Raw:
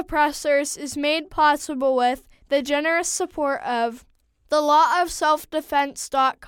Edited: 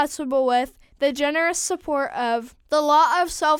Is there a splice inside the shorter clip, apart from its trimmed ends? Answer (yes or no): yes